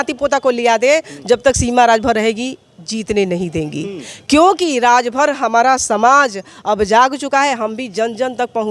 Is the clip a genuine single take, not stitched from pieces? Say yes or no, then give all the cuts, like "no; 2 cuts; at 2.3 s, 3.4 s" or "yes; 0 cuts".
yes; 0 cuts